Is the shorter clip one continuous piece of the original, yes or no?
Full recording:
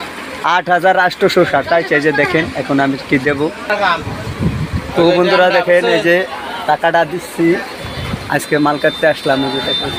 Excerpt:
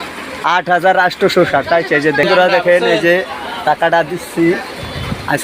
no